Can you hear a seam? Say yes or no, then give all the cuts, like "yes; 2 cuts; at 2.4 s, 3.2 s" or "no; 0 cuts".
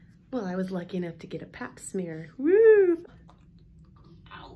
yes; 1 cut; at 3.0 s